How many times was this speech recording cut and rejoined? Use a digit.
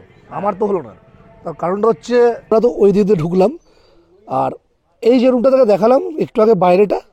1